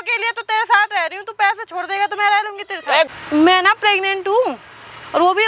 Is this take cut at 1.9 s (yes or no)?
no